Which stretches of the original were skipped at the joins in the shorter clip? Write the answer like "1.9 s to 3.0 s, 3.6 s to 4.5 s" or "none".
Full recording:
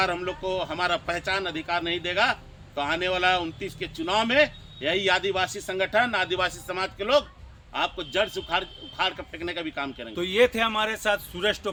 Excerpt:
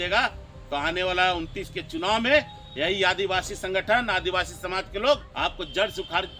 7.3 s to 7.7 s